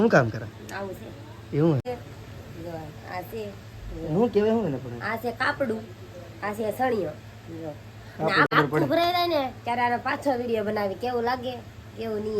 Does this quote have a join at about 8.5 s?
yes; 2 cuts; at 1.8 s, 8.5 s

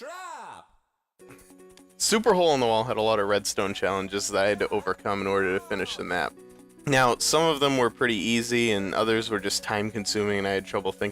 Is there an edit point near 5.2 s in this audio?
yes; 1 cut; at 5.2 s

